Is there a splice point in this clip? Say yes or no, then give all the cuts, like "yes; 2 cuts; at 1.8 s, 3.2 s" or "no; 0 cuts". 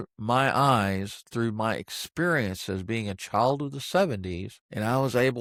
no; 0 cuts